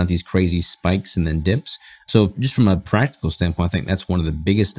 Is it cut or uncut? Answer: cut